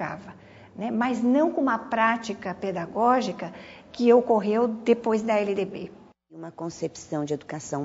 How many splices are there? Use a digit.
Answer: 1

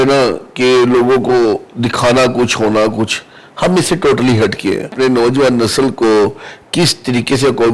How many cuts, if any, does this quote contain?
1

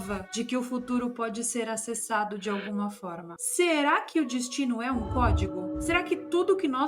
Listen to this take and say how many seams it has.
1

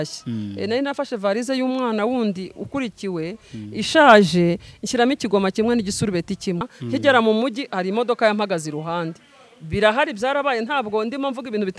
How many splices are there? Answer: 1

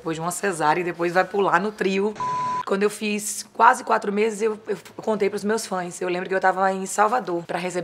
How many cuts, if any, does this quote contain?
1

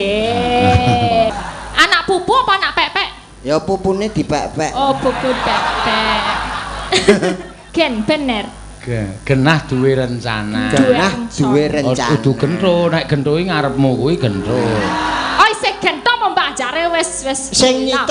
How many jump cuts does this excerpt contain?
2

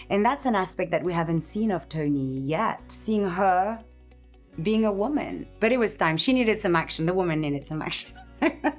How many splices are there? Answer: 2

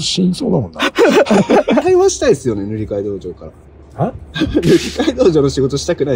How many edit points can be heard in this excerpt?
1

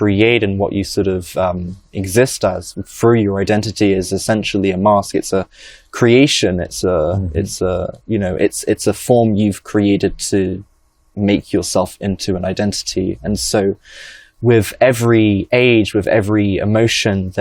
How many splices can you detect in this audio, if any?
0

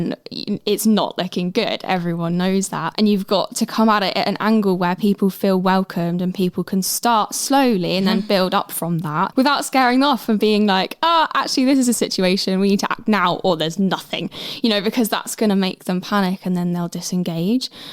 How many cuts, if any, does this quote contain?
0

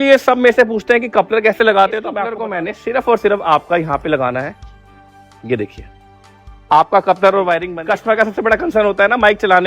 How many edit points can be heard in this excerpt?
2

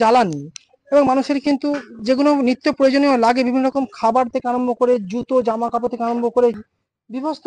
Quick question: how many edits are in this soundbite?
1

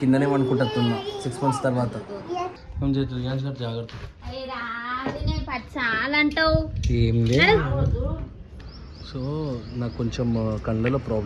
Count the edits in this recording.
1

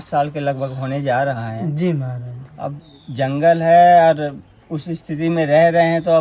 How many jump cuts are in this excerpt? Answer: 0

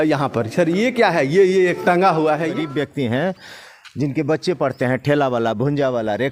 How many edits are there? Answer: 1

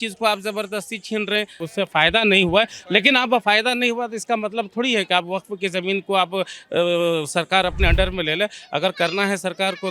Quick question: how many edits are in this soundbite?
1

